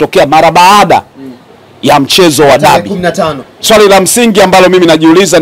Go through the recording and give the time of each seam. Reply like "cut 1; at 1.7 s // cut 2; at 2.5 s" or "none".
cut 1; at 3.5 s